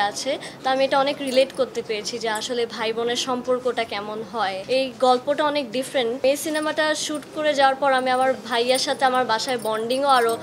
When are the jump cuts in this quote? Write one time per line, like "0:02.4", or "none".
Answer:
0:04.6
0:06.2